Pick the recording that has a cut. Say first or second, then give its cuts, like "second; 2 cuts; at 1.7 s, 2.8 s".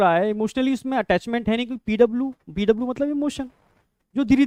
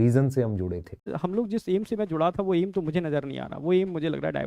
second; 1 cut; at 1.1 s